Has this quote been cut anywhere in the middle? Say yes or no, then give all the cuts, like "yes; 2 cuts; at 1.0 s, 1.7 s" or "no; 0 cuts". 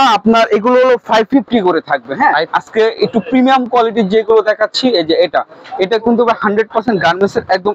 yes; 1 cut; at 2.5 s